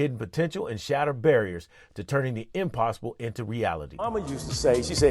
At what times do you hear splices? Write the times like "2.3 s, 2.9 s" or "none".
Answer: 3.9 s